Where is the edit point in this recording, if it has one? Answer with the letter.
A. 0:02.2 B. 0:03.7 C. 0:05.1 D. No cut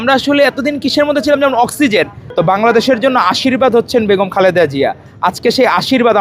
A